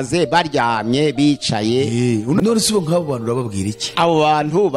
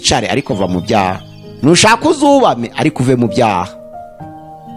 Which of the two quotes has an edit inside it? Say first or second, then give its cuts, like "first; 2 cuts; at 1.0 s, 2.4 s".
first; 2 cuts; at 2.4 s, 3.8 s